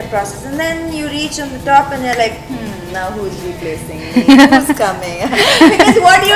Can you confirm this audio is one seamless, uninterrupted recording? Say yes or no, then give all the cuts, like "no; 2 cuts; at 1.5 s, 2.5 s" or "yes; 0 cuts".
yes; 0 cuts